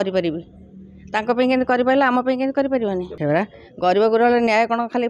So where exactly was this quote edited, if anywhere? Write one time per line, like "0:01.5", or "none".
0:03.1